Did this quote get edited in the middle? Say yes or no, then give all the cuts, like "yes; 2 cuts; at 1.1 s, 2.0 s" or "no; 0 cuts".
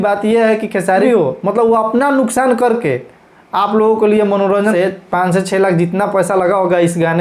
yes; 2 cuts; at 1.0 s, 4.7 s